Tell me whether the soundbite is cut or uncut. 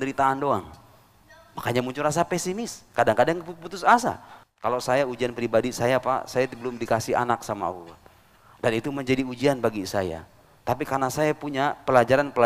cut